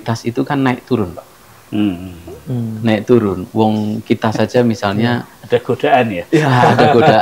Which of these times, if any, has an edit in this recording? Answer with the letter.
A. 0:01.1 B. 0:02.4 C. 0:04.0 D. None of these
D